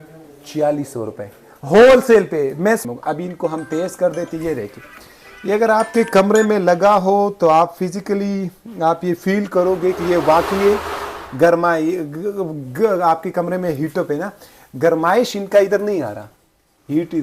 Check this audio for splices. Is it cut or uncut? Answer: cut